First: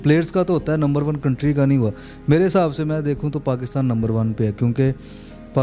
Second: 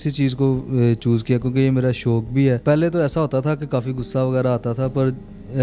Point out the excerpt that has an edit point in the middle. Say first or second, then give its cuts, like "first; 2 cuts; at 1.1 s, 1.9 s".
second; 1 cut; at 2.6 s